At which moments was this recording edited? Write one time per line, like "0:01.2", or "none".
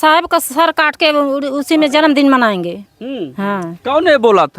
none

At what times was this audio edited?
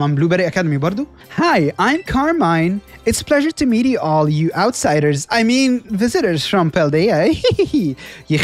0:01.2

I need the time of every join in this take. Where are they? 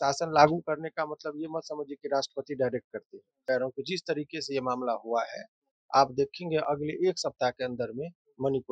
0:03.4

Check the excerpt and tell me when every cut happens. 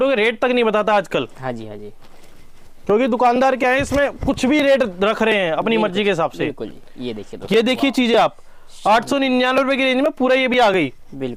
none

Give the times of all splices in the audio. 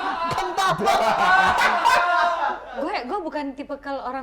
0:02.7

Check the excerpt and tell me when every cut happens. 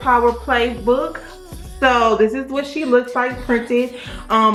none

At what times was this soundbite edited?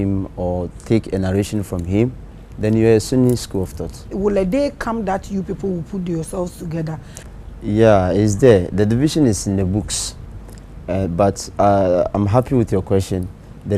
0:04.1

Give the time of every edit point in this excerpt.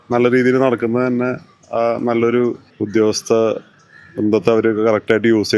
none

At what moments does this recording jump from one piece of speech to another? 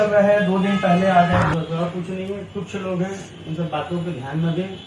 0:01.4

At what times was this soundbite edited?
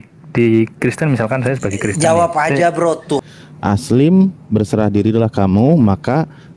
0:03.2

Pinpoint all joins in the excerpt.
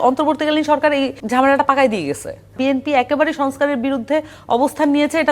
0:01.2
0:02.5

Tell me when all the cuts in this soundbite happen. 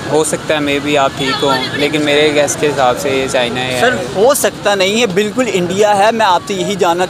none

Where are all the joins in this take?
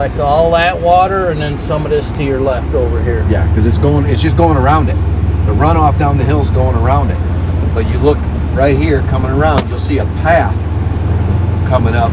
none

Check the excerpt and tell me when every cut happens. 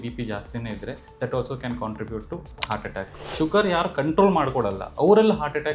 0:03.2

